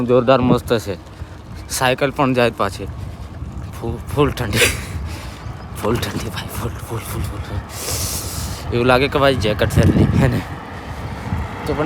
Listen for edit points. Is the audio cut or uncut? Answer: uncut